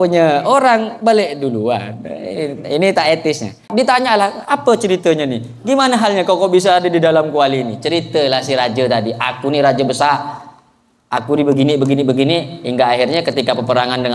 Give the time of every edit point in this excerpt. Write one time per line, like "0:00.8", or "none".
0:03.6